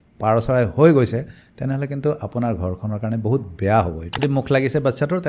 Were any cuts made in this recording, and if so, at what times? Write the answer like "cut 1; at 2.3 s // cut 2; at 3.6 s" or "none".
cut 1; at 4.2 s